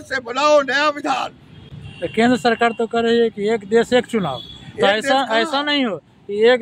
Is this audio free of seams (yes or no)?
yes